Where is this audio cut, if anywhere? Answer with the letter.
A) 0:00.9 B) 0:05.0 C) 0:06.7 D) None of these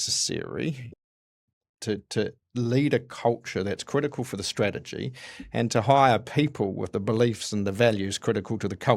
D